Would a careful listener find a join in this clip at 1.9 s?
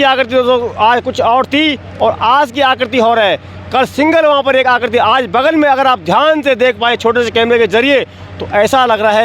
no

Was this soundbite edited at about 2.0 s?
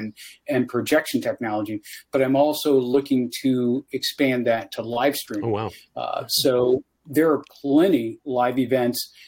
no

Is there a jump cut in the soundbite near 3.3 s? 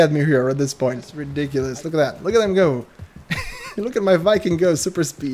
no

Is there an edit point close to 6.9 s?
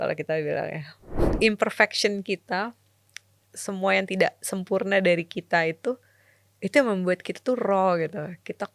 no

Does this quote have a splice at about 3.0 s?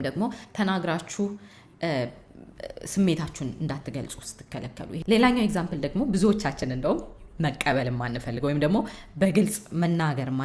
no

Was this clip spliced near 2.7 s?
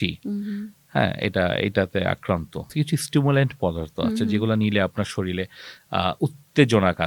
yes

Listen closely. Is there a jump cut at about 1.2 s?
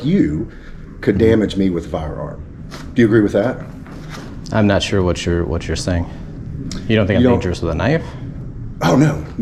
no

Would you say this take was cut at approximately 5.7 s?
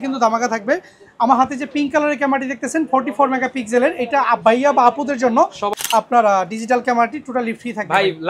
yes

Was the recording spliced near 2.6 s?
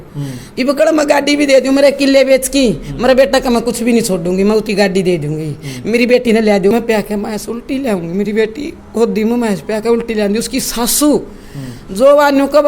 no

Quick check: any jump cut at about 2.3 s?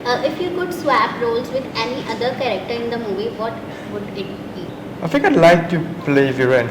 no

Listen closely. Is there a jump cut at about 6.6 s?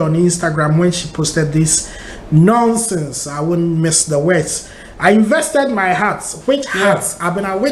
no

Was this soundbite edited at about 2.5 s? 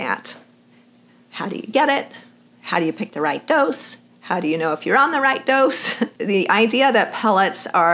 no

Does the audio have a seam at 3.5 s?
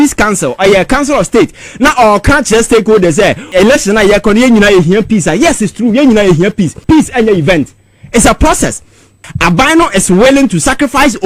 yes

